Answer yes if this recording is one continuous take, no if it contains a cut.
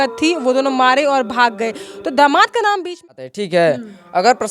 no